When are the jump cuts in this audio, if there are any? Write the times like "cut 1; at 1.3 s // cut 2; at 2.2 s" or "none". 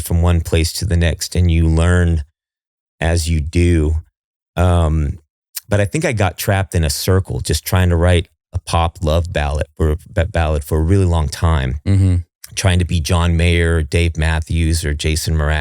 none